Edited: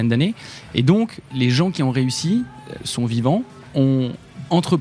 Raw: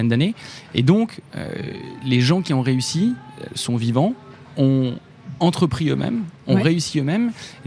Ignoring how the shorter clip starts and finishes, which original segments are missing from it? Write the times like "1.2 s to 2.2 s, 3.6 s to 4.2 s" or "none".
1.2 s to 1.9 s, 4.5 s to 4.7 s